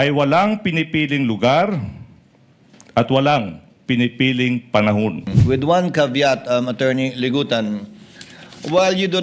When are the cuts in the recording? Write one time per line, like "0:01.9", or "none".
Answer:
0:05.3